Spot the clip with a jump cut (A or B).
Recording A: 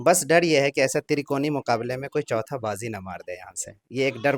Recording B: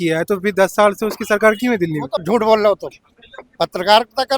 B